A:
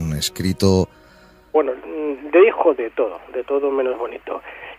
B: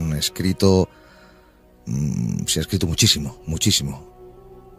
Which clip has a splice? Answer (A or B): B